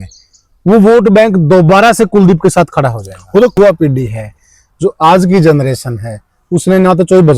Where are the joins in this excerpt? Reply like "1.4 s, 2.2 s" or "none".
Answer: 3.6 s